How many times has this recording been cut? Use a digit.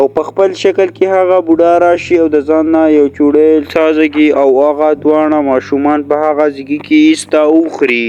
0